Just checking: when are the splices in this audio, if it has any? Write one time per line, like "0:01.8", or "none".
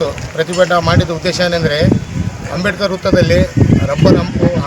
0:03.3